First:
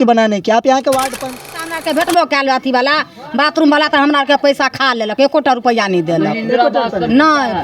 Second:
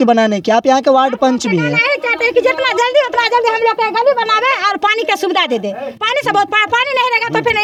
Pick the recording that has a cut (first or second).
first